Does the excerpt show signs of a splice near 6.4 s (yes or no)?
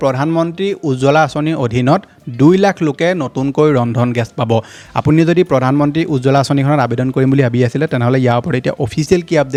no